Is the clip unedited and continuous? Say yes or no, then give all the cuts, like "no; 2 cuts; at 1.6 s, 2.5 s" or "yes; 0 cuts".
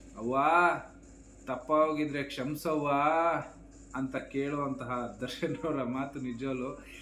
yes; 0 cuts